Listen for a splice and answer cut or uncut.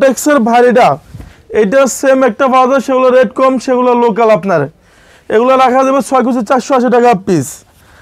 uncut